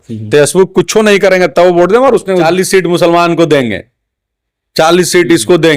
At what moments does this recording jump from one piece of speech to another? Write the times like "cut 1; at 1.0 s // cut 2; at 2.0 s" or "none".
cut 1; at 2.5 s